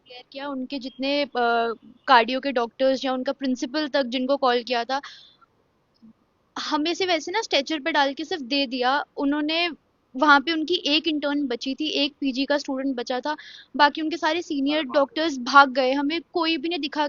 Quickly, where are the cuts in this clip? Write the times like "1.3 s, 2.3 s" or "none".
none